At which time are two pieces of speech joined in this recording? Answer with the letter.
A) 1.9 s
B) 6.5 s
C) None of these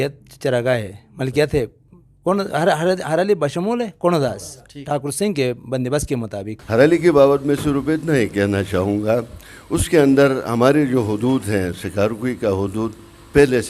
B